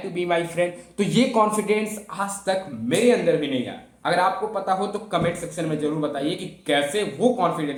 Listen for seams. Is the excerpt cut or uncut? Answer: uncut